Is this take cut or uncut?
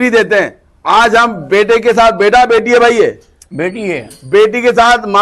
uncut